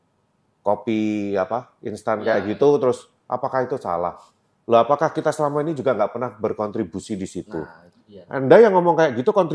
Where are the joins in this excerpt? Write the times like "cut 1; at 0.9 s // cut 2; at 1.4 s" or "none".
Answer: none